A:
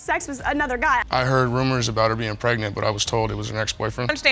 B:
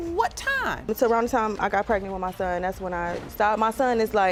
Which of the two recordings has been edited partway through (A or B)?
A